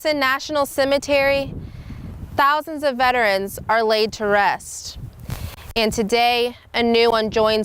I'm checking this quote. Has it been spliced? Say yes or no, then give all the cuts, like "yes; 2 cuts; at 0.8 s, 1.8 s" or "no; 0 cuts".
no; 0 cuts